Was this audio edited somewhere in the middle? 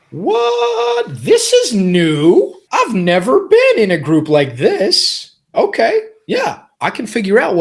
yes; 3 cuts; at 2.6 s, 5.5 s, 6.7 s

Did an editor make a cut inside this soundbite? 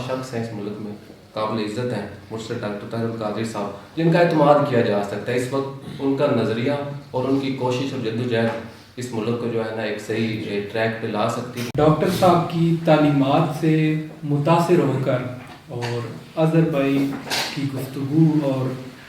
yes; 1 cut; at 11.7 s

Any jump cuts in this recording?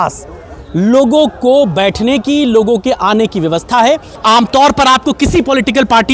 yes; 1 cut; at 4.2 s

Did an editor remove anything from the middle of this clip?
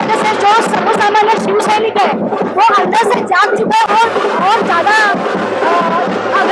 no; 0 cuts

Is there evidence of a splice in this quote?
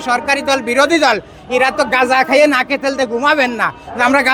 no; 0 cuts

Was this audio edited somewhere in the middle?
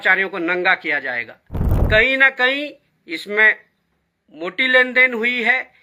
yes; 1 cut; at 1.8 s

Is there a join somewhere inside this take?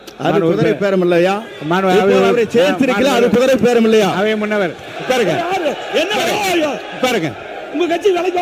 no; 0 cuts

